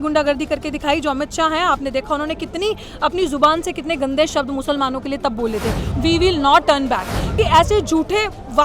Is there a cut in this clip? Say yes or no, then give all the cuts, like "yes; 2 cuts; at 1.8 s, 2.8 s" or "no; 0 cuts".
yes; 2 cuts; at 5.8 s, 7.3 s